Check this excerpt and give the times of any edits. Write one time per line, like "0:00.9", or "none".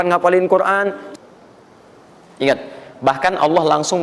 0:01.0